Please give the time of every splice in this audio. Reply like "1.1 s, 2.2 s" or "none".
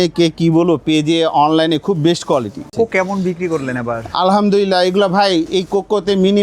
2.7 s